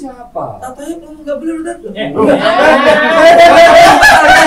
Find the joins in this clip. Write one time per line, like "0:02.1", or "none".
none